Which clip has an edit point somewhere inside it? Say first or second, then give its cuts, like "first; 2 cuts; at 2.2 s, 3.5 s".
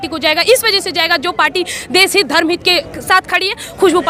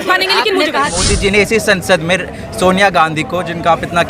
second; 1 cut; at 1.0 s